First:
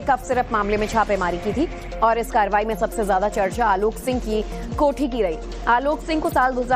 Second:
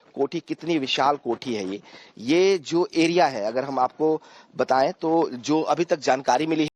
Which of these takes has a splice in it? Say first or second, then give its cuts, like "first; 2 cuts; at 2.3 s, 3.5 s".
first; 1 cut; at 1.0 s